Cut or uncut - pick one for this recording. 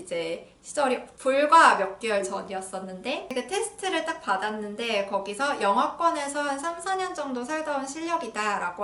cut